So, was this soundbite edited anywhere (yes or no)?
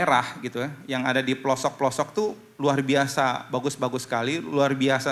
no